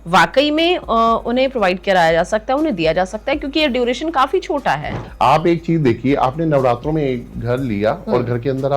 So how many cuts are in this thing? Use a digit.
1